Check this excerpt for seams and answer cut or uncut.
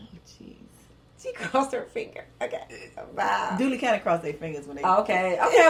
uncut